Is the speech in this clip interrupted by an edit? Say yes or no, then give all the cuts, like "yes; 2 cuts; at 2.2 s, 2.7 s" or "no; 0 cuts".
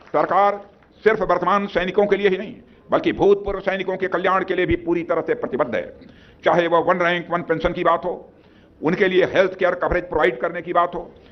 no; 0 cuts